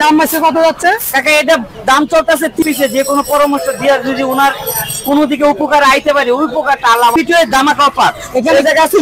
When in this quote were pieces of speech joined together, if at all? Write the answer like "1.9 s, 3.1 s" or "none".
2.6 s, 7.1 s